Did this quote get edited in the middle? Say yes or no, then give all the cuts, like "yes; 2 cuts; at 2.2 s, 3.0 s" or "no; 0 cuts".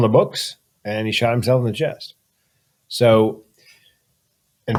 no; 0 cuts